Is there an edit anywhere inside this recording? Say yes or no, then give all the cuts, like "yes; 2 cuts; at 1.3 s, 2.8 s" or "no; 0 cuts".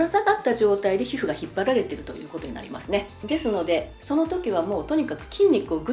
no; 0 cuts